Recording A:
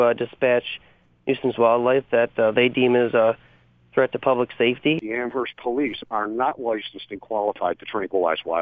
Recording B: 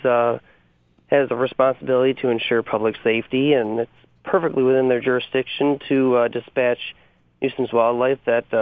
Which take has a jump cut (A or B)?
A